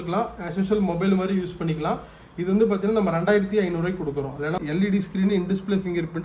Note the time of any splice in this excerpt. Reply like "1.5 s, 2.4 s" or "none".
4.6 s

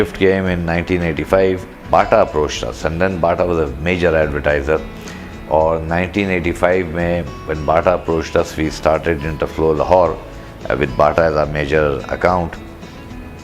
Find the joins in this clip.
1.8 s

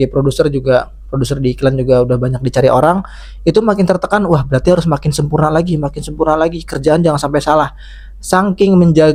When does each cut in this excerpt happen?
none

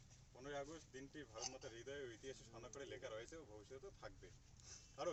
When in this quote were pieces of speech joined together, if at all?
none

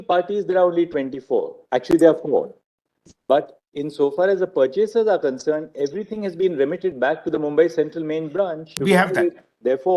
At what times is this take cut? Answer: 8.8 s

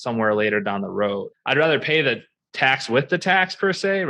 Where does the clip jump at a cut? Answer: none

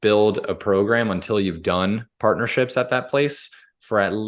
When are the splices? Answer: none

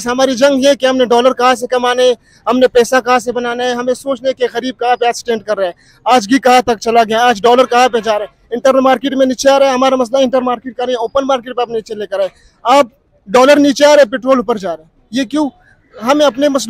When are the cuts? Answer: none

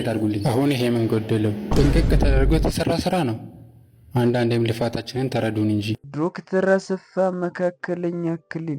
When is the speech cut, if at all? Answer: 6.1 s

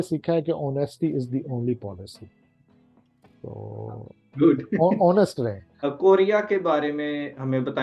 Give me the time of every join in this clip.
5.9 s

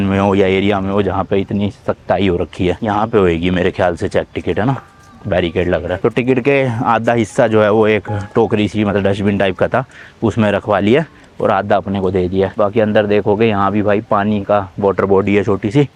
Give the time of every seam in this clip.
none

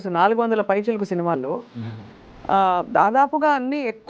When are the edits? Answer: none

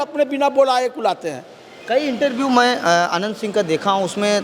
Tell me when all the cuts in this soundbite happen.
none

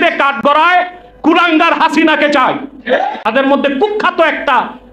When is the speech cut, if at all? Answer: 3.2 s

